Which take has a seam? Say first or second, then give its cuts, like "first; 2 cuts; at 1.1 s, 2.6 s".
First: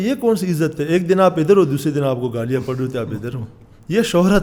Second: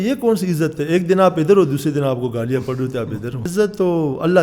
second; 1 cut; at 3.5 s